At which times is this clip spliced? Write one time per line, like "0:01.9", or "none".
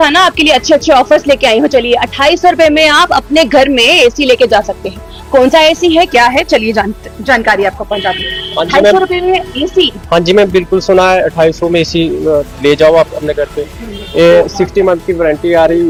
none